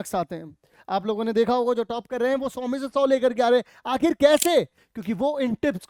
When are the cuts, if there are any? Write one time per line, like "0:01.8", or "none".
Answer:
none